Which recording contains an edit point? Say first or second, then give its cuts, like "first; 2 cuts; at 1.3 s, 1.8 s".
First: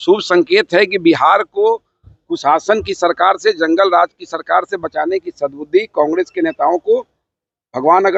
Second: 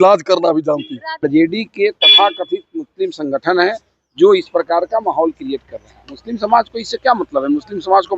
second; 1 cut; at 1.0 s